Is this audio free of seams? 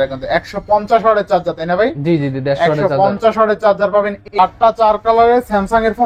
no; 1 cut; at 4.2 s

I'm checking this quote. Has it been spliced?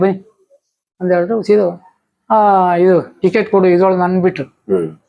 no; 0 cuts

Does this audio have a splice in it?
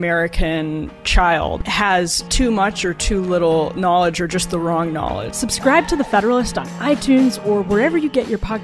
yes; 2 cuts; at 1.6 s, 5.3 s

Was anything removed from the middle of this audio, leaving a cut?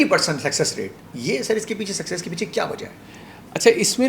no; 0 cuts

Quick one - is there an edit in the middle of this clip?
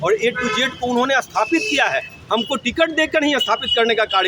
no; 0 cuts

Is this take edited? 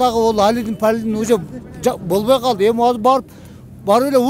no; 0 cuts

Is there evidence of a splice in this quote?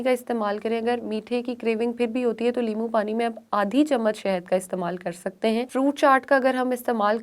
yes; 1 cut; at 5.7 s

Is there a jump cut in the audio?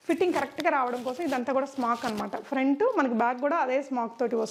no; 0 cuts

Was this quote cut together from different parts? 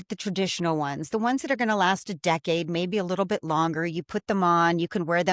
no; 0 cuts

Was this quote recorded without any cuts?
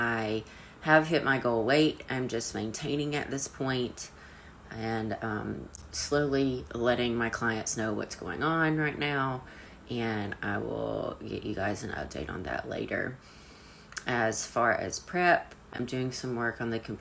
yes; 0 cuts

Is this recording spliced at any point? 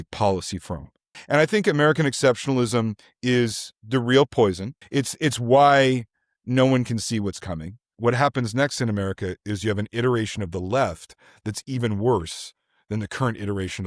yes; 3 cuts; at 1.2 s, 4.7 s, 7.8 s

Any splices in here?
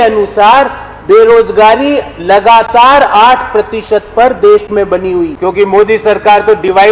yes; 1 cut; at 5.3 s

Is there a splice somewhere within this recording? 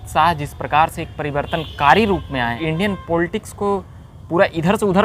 yes; 1 cut; at 2.6 s

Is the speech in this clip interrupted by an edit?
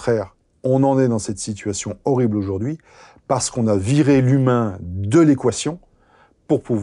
no; 0 cuts

